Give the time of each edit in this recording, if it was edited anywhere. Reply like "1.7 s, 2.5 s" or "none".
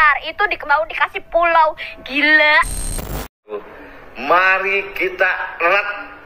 3.4 s